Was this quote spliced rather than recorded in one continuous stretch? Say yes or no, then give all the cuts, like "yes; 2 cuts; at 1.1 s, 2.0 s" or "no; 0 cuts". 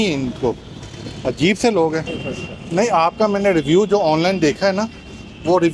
yes; 1 cut; at 2.2 s